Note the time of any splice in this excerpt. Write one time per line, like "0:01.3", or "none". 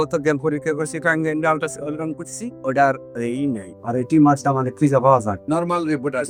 none